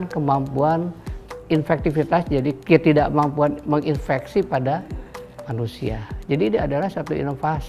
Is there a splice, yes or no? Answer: yes